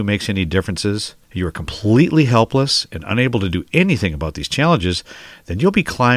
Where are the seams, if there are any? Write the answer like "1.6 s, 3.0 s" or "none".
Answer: 1.2 s